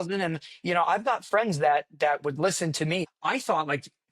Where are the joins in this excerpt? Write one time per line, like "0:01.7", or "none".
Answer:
0:03.1